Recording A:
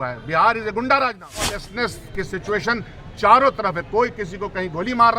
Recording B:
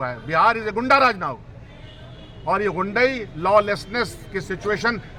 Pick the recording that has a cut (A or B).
A